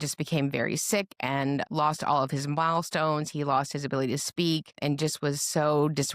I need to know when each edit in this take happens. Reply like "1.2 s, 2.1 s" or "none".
1.7 s, 4.8 s

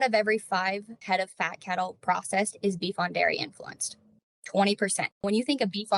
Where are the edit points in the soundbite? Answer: 0.9 s, 5.2 s

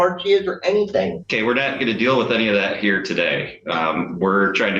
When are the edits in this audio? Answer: none

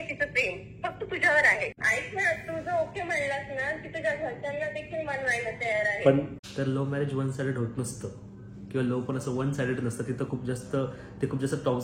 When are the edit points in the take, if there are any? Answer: 1.8 s, 6.4 s

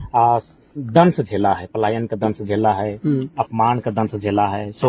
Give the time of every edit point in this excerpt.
none

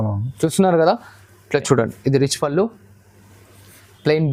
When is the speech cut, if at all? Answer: none

